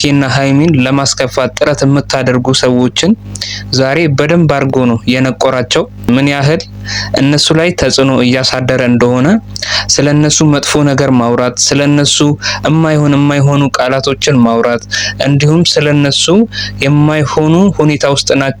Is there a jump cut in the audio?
no; 0 cuts

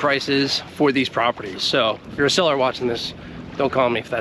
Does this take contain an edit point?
yes; 1 cut; at 2.0 s

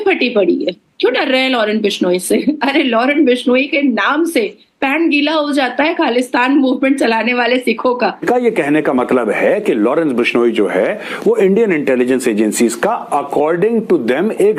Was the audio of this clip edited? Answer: yes; 1 cut; at 8.3 s

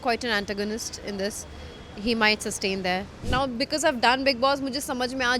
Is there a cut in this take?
yes; 1 cut; at 3.2 s

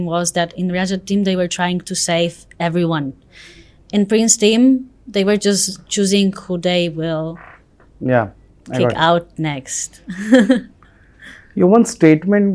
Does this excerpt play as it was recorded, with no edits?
yes; 0 cuts

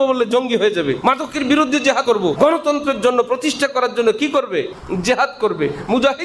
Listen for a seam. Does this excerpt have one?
yes; 3 cuts; at 1.0 s, 2.1 s, 4.8 s

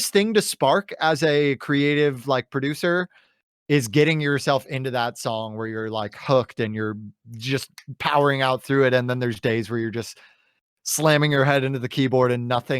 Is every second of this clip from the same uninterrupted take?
yes; 0 cuts

